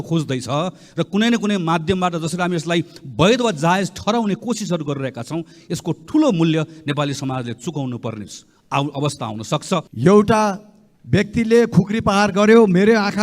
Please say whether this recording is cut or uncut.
cut